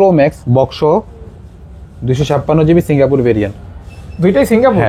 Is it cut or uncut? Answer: uncut